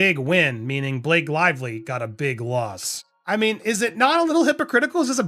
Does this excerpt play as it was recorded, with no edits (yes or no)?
no